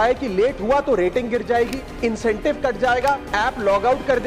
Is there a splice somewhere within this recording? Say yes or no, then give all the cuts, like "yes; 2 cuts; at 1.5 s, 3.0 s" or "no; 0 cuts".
yes; 2 cuts; at 1.8 s, 3.3 s